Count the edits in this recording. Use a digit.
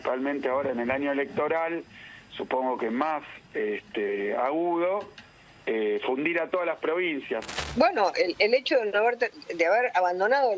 1